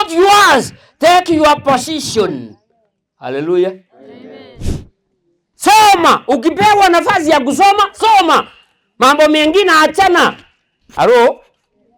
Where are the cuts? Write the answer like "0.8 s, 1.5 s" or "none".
4.7 s